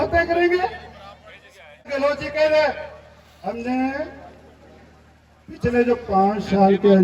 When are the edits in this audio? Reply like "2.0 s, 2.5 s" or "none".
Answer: 1.8 s